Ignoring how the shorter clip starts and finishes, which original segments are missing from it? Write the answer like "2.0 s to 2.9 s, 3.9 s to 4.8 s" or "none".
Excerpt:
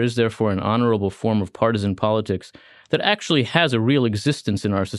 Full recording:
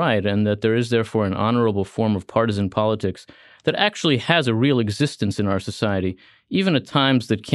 none